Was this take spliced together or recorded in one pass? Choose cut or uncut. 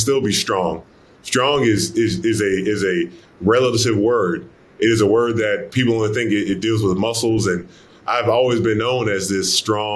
cut